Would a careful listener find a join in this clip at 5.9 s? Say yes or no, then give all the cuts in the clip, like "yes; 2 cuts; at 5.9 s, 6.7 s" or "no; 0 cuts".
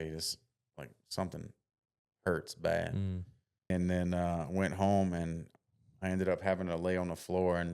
no; 1 cut; at 3.7 s